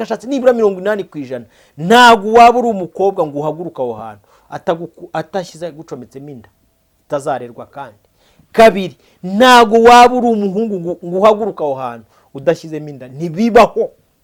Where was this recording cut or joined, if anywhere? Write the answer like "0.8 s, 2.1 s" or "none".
none